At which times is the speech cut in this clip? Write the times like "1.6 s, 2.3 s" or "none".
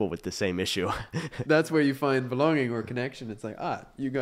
1.4 s